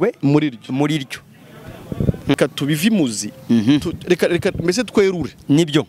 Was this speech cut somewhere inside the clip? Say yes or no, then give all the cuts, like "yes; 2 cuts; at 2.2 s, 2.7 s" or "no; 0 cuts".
yes; 1 cut; at 2.3 s